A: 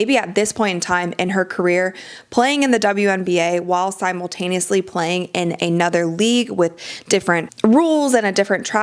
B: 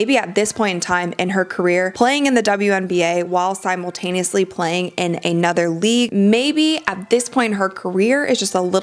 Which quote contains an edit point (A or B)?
B